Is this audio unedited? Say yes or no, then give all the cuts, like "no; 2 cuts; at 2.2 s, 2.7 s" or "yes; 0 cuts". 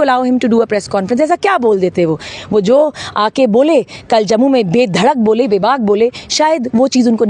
yes; 0 cuts